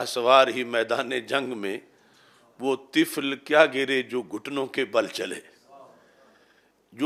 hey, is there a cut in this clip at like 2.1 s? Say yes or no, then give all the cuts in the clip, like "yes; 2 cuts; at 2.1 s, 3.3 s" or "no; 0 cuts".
no; 0 cuts